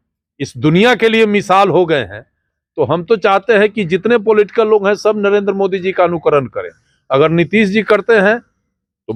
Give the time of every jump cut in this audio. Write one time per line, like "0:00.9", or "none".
none